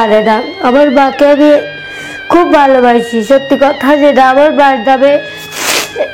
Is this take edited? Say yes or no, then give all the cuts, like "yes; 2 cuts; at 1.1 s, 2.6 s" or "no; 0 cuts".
no; 0 cuts